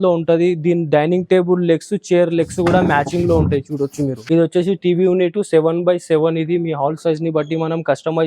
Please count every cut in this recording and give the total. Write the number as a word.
one